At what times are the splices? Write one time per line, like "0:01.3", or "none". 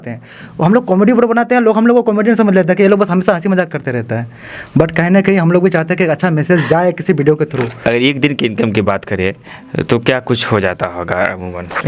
0:07.8